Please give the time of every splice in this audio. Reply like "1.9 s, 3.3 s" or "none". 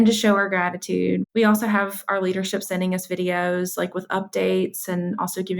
1.2 s